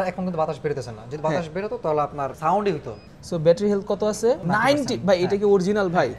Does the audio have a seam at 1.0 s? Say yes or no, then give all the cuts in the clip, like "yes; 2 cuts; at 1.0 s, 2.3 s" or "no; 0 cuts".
no; 3 cuts; at 2.4 s, 3.1 s, 4.4 s